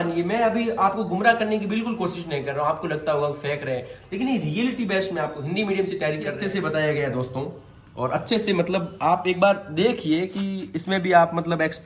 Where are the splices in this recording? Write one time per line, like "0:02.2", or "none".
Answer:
0:06.4